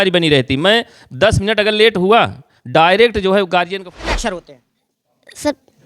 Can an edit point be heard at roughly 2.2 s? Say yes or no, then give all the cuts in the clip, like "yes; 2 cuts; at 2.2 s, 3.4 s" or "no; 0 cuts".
no; 1 cut; at 4.1 s